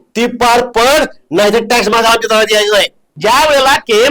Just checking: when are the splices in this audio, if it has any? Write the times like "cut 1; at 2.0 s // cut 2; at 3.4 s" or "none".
cut 1; at 3.1 s